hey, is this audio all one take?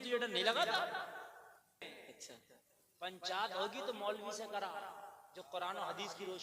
no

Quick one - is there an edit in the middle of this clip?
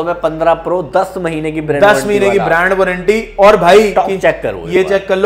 no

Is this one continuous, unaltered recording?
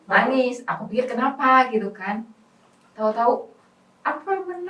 yes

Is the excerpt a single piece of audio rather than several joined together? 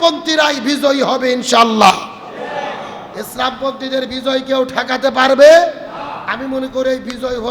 yes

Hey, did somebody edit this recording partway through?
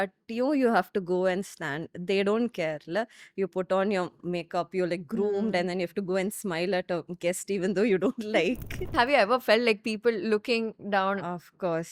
yes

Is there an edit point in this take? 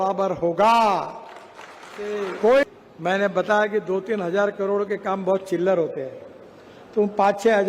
yes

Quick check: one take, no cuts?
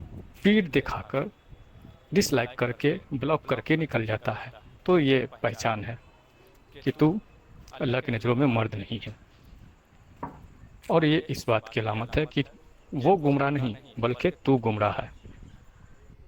no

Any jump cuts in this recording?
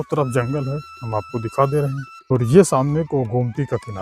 yes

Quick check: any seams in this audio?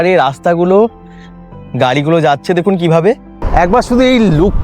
yes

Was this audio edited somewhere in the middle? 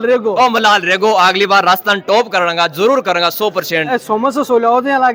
no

